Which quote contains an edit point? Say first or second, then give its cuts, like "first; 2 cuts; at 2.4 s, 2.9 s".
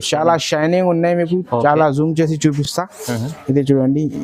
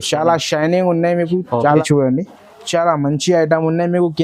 second; 1 cut; at 1.8 s